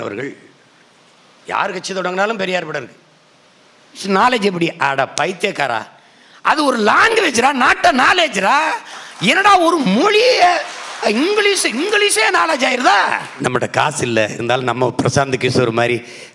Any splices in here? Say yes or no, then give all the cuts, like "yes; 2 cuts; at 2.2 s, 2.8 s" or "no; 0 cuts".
yes; 2 cuts; at 4.0 s, 13.3 s